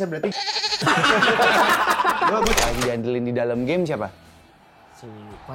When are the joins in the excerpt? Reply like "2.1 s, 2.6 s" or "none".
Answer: 2.6 s